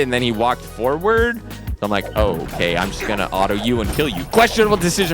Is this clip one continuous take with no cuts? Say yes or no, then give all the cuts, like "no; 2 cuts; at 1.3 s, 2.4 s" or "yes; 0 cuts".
no; 1 cut; at 4.2 s